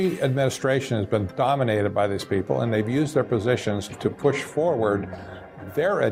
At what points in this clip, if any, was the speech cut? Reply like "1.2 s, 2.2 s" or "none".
none